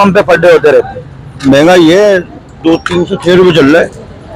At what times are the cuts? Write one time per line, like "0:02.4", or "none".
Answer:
0:01.4